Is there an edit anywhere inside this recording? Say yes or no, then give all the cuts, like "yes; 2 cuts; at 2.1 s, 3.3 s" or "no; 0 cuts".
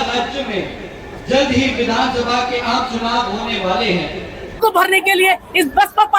yes; 1 cut; at 4.6 s